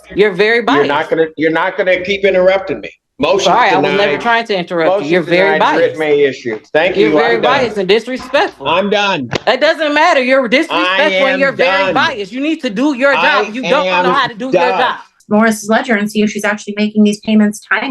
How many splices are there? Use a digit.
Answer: 1